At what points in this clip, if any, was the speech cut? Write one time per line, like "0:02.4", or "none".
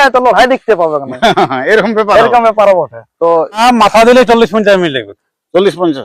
0:03.6